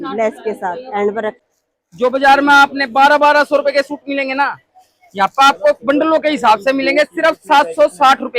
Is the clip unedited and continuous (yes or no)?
no